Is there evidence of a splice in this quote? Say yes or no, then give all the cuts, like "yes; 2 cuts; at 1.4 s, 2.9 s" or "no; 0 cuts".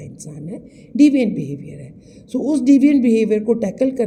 no; 0 cuts